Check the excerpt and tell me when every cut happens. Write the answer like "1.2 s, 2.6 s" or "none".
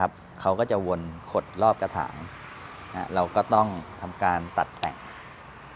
none